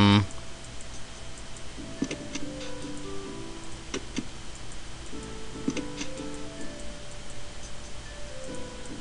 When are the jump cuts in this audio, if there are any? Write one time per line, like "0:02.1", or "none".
0:01.4